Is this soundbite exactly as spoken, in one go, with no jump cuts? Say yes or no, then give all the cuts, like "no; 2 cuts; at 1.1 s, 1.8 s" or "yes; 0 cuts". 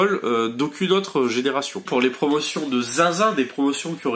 no; 1 cut; at 1.9 s